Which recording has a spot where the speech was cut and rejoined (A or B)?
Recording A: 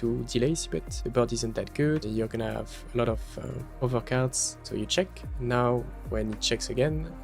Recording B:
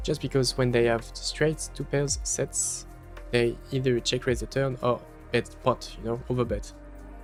A